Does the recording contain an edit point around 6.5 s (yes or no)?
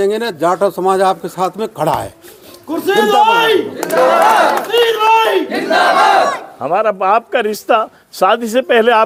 no